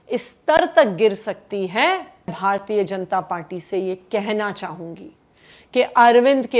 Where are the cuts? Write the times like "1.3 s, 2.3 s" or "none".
2.4 s